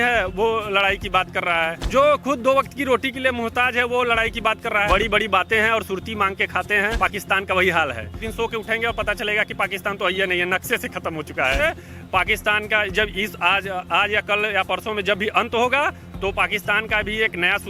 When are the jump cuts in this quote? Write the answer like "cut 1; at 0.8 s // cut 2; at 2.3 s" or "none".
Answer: cut 1; at 1.8 s // cut 2; at 4.9 s // cut 3; at 7.0 s // cut 4; at 8.2 s // cut 5; at 11.6 s